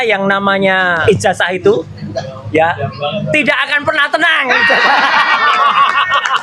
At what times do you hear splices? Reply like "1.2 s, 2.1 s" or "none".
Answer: 1.0 s